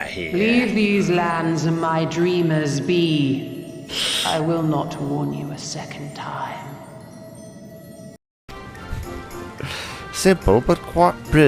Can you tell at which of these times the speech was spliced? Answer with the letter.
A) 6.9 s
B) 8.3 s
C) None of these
B